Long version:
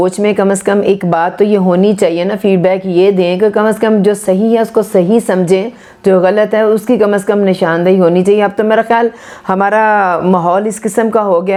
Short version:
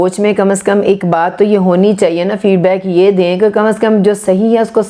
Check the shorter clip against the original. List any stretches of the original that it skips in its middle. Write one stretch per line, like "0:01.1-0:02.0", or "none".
none